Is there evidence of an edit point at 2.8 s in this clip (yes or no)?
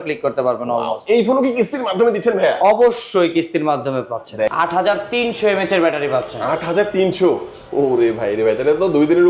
no